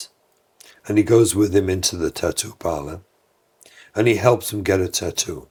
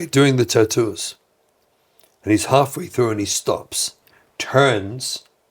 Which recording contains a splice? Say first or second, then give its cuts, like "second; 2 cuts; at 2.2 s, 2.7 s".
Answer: second; 1 cut; at 3.9 s